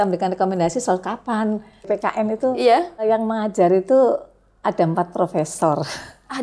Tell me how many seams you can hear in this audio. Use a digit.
2